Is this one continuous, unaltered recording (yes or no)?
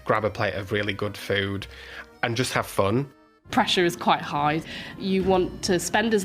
no